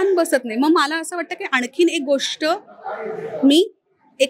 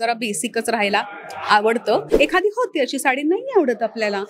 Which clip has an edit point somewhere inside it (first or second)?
second